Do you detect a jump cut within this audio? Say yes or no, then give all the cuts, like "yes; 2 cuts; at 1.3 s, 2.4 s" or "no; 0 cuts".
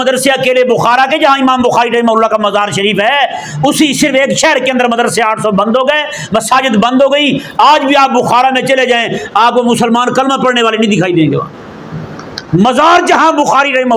no; 0 cuts